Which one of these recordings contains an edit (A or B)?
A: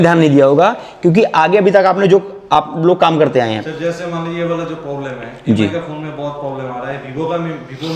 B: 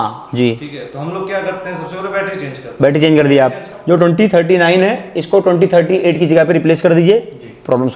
B